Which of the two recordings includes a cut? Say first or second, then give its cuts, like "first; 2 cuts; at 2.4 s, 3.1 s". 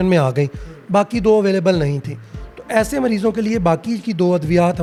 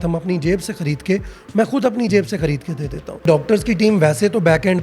second; 1 cut; at 3.2 s